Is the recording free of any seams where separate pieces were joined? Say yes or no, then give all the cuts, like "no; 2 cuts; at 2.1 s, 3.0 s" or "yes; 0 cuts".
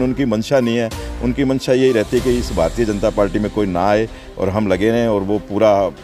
yes; 0 cuts